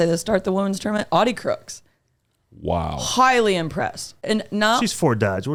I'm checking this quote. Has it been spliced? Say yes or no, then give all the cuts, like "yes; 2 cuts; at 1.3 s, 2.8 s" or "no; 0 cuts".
no; 0 cuts